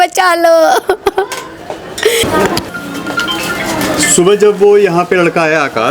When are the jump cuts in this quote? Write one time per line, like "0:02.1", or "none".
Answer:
0:02.2